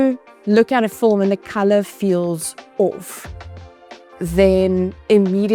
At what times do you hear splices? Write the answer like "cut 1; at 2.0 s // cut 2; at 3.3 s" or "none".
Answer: none